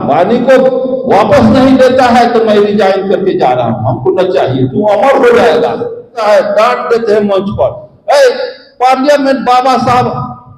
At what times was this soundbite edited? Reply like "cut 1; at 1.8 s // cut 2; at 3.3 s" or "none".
cut 1; at 6.2 s